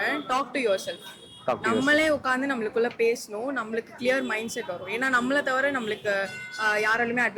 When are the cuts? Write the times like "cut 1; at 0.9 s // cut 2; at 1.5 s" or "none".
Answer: none